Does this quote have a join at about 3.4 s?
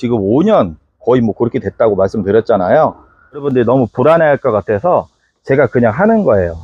yes; 1 cut; at 3.4 s

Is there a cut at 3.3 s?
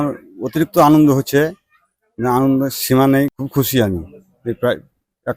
yes; 1 cut; at 3.3 s

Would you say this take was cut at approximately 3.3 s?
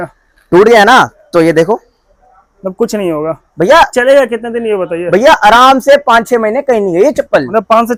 no; 0 cuts

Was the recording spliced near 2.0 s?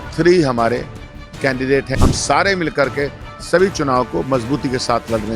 yes; 1 cut; at 2.0 s

